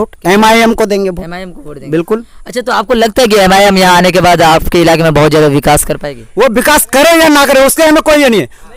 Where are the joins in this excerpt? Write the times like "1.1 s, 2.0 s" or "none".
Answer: none